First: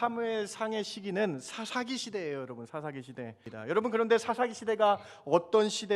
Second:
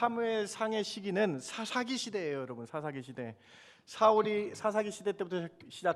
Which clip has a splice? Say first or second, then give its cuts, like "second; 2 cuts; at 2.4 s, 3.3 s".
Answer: first; 1 cut; at 3.5 s